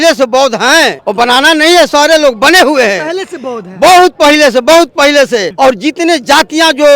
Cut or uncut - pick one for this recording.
cut